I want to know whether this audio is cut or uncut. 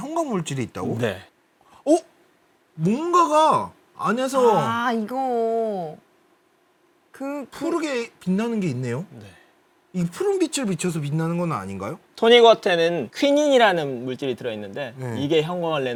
uncut